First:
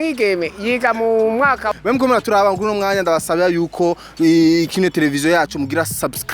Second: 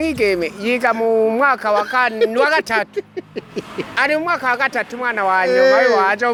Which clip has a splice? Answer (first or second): first